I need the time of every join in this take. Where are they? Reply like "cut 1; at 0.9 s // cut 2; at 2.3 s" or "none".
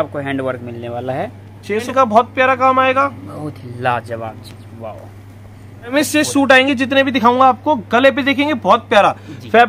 cut 1; at 1.9 s // cut 2; at 5.9 s